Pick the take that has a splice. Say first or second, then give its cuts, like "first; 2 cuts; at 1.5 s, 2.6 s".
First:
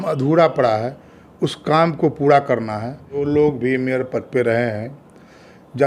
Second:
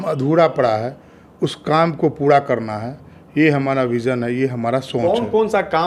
first; 1 cut; at 3.1 s